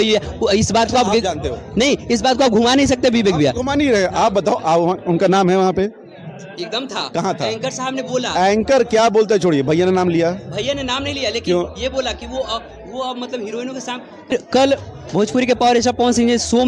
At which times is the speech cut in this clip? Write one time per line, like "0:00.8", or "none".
0:14.3